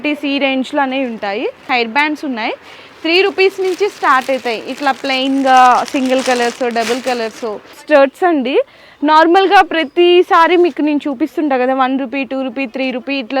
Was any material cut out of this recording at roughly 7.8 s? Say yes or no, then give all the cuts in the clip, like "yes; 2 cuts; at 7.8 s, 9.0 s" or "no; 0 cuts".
yes; 2 cuts; at 1.6 s, 7.8 s